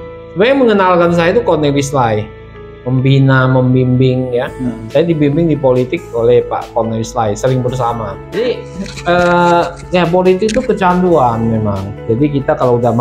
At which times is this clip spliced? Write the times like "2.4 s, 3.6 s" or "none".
8.4 s